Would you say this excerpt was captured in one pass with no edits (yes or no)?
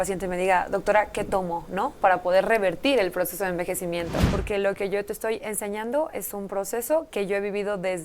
no